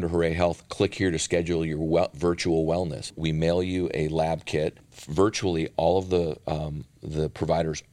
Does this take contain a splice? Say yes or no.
yes